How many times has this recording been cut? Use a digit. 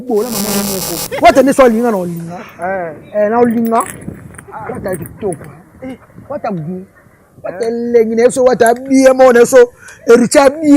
1